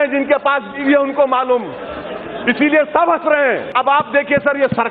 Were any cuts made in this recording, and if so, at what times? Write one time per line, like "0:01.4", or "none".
0:03.7